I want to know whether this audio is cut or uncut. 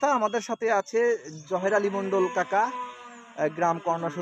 uncut